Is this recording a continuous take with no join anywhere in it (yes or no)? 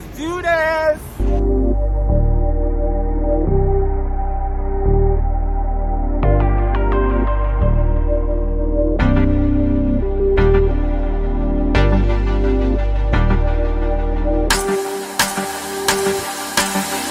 yes